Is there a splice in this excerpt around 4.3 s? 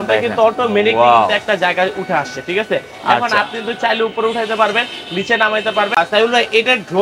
no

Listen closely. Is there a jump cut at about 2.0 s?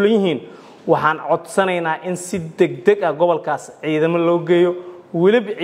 no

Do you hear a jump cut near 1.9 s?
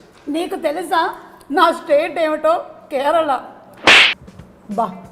no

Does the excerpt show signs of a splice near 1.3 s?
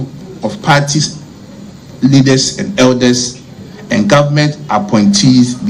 no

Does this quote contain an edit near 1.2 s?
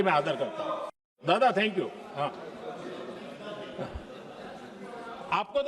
yes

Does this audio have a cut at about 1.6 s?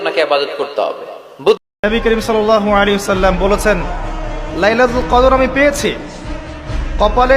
yes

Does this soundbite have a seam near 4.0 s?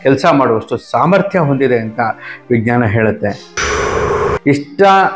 yes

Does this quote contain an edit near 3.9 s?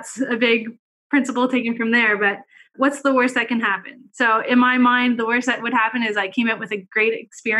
no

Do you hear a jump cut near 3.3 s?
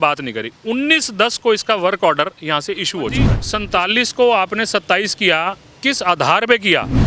yes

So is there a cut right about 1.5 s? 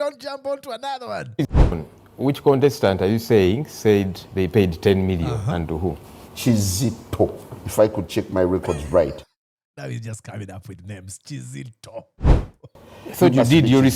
yes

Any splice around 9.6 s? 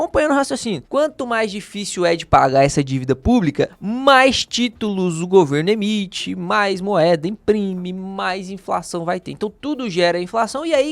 yes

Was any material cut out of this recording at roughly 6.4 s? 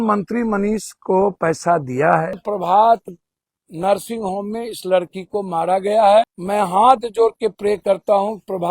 yes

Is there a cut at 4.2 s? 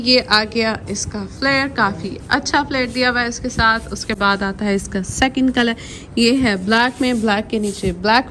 no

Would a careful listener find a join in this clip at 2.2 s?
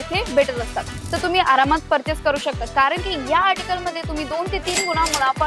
no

